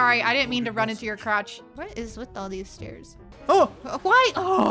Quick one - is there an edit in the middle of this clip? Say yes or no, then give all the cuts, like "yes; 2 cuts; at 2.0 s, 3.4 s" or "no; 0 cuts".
yes; 1 cut; at 1.6 s